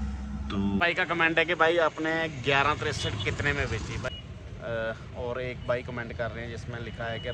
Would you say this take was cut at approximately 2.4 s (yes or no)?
no